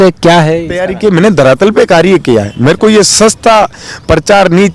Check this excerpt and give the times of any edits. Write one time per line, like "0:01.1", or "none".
0:00.9